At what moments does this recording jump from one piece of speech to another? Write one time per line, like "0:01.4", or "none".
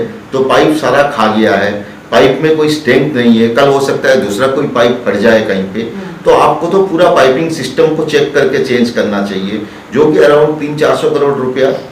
none